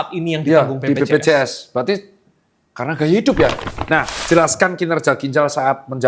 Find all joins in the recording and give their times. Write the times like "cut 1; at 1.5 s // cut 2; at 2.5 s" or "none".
cut 1; at 3.9 s